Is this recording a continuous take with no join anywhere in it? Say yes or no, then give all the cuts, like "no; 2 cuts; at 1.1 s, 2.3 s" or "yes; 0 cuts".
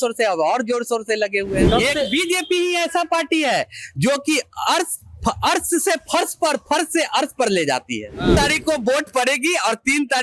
no; 2 cuts; at 1.6 s, 8.3 s